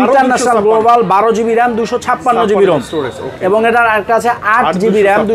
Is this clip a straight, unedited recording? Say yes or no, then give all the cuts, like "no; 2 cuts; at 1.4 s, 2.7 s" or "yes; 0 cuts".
yes; 0 cuts